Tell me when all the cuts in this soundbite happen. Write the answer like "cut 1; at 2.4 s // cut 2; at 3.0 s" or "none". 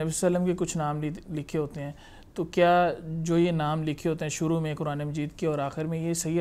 none